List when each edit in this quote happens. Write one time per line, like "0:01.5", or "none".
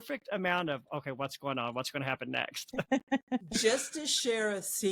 none